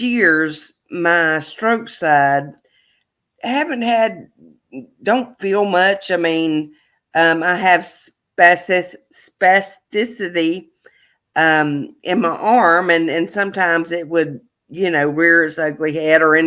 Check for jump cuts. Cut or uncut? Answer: uncut